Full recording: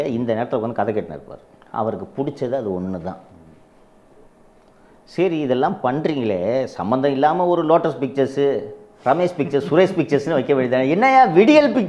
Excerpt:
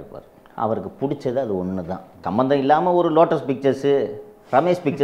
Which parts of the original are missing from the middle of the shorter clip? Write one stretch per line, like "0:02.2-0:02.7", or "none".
0:03.4-0:06.8